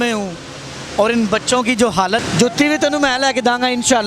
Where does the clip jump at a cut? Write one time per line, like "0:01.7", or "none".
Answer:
0:02.2